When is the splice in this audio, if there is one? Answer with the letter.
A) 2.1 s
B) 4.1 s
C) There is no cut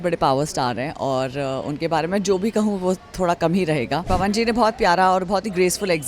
B